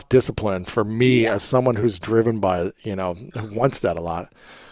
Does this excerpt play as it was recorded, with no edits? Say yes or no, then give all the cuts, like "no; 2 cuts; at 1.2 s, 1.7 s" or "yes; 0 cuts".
yes; 0 cuts